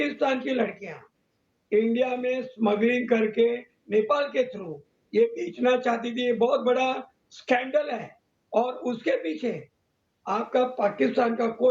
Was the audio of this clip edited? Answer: no; 0 cuts

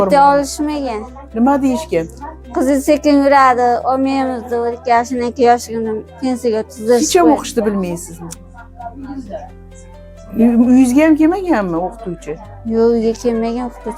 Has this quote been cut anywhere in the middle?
no; 0 cuts

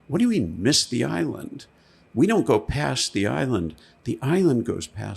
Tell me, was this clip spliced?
no; 0 cuts

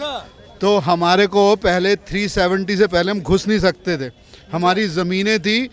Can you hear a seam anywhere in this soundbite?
no; 0 cuts

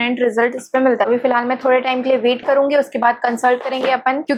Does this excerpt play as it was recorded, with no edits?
yes; 0 cuts

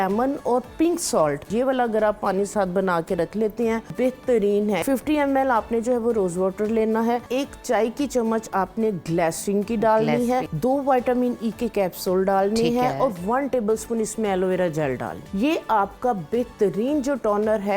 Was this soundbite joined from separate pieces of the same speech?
yes; 6 cuts; at 1.5 s, 3.9 s, 4.8 s, 7.3 s, 10.5 s, 15.2 s

